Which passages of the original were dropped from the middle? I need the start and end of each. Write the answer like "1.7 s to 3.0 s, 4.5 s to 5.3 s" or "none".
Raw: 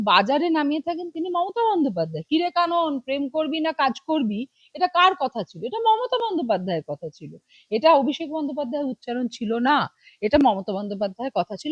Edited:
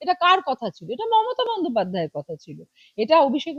none